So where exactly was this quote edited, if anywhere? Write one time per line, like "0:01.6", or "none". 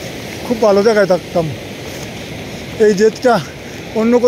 none